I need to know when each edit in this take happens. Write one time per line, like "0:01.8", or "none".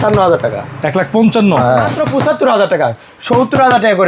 0:02.0